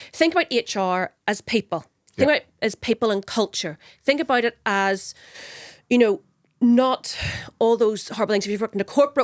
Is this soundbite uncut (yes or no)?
yes